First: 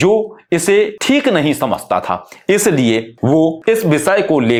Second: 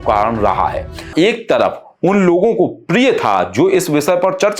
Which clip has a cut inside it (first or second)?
second